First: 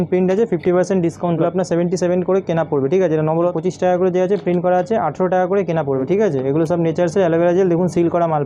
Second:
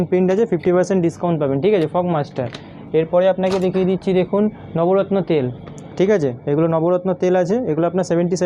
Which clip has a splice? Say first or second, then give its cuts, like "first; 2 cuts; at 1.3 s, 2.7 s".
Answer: first; 3 cuts; at 1.4 s, 3.5 s, 6.0 s